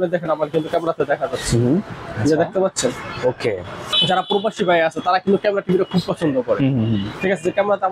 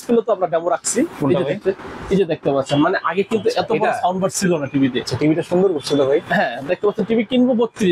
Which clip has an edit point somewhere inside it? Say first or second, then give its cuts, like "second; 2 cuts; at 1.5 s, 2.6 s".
first; 1 cut; at 3.9 s